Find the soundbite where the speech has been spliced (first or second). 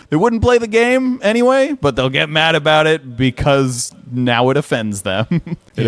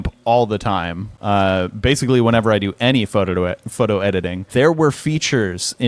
second